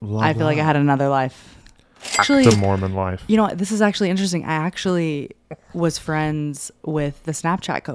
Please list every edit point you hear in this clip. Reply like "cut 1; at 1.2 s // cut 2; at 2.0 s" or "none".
cut 1; at 2.2 s